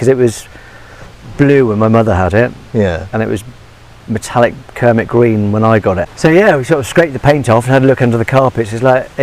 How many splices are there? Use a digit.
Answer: 1